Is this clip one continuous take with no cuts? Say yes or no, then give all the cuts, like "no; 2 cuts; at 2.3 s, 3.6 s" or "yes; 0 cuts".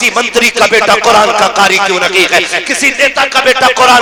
yes; 0 cuts